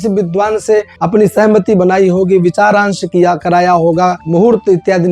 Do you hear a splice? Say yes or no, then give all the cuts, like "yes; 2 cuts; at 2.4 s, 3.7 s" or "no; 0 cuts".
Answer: yes; 1 cut; at 0.9 s